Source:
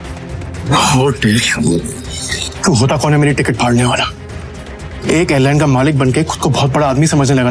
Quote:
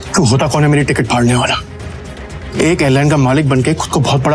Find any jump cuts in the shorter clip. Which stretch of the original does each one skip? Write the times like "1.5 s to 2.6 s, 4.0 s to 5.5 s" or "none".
none